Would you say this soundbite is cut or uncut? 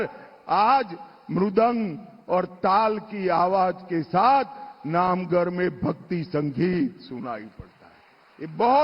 cut